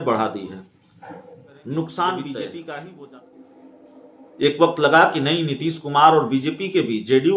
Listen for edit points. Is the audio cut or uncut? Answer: cut